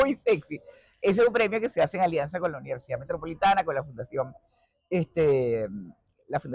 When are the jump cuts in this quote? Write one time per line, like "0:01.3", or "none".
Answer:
none

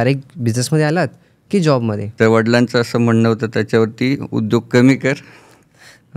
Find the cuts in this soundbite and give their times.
0:02.0

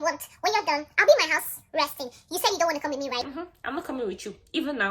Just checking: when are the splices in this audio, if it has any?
none

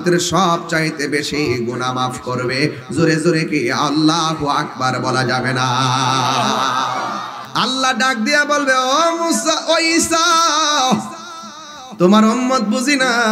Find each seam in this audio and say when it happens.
0:07.4

